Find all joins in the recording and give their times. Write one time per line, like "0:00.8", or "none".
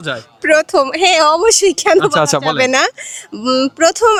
none